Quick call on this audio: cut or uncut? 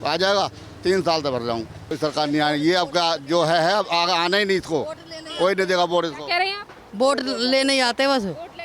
cut